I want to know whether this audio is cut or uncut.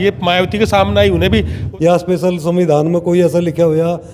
cut